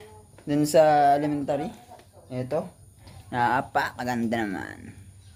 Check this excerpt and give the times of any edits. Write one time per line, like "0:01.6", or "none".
none